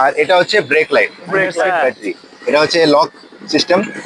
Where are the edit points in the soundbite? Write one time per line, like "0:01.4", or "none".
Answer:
0:01.6